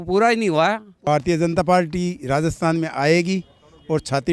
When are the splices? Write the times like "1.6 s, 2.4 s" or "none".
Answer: 1.0 s